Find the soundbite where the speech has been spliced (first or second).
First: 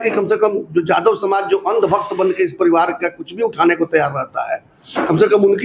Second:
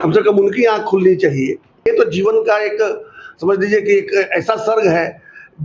second